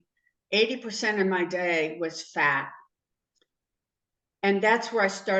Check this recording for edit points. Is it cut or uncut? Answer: uncut